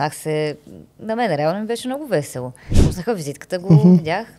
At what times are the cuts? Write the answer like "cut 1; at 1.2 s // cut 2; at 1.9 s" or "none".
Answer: cut 1; at 2.8 s